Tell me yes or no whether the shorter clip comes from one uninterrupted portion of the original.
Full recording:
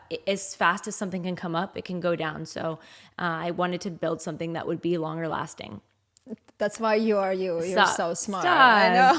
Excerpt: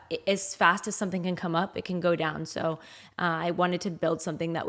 yes